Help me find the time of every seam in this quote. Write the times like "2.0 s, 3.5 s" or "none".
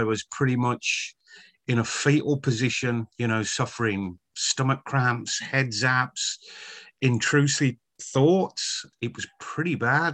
3.1 s, 8.8 s

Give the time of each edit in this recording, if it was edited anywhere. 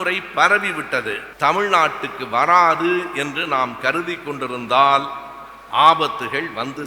1.3 s

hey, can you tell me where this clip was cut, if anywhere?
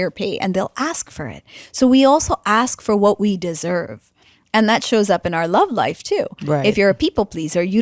none

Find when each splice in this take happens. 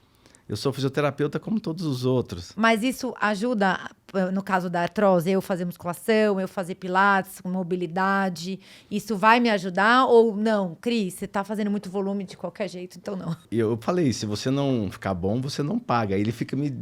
2.4 s, 13.4 s

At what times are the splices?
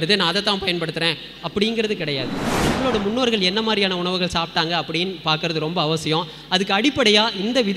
2.6 s

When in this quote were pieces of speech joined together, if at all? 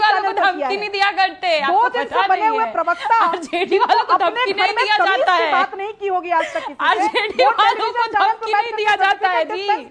5.9 s

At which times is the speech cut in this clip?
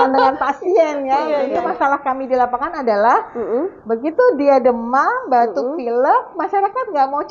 1.5 s

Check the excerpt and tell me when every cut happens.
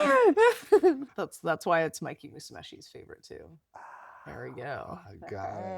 1.1 s

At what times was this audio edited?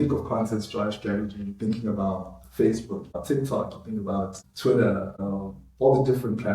3.1 s, 4.5 s, 5.1 s

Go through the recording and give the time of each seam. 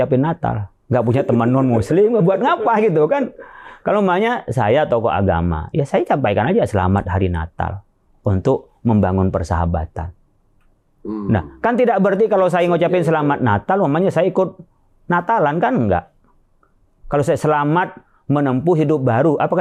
none

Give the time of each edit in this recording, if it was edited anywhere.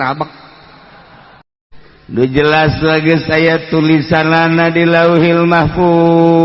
1.4 s

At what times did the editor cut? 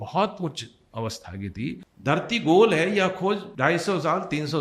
1.9 s, 3.5 s

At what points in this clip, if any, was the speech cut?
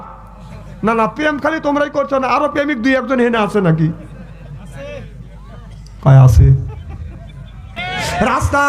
7.7 s

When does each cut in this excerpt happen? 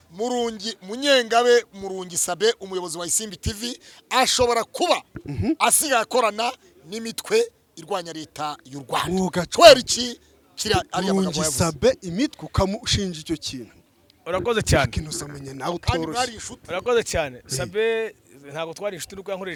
none

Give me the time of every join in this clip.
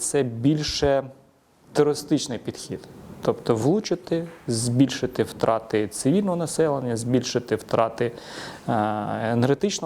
none

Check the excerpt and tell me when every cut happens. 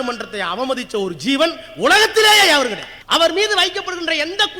2.9 s

